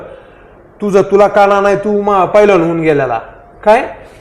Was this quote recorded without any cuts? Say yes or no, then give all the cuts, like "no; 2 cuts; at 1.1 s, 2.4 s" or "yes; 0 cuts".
yes; 0 cuts